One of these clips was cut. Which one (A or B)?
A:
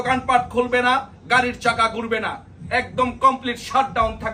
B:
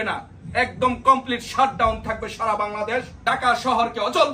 B